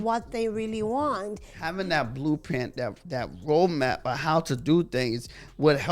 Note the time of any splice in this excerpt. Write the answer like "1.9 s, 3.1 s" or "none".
1.6 s